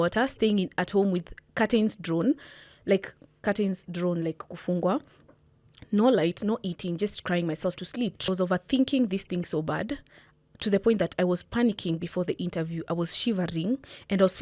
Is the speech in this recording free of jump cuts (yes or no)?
no